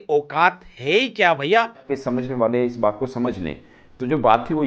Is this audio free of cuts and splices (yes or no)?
no